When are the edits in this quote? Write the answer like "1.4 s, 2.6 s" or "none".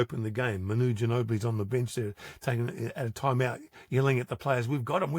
none